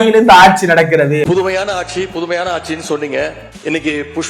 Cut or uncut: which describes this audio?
uncut